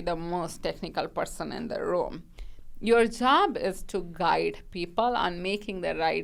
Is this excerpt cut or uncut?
uncut